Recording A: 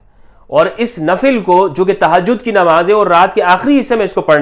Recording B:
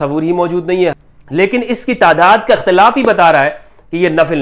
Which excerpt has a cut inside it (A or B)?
B